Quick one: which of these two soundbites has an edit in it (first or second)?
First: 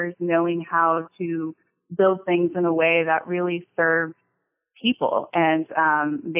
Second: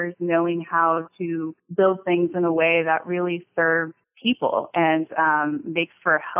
second